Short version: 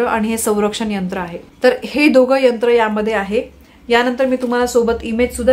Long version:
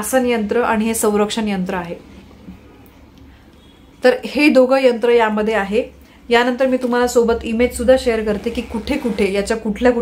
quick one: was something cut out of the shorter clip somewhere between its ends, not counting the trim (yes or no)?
yes